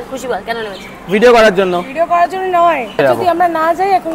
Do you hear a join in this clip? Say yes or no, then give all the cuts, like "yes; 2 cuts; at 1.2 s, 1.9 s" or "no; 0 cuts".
yes; 1 cut; at 3.0 s